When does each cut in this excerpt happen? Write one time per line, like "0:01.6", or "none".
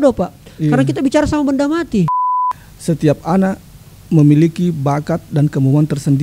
0:02.2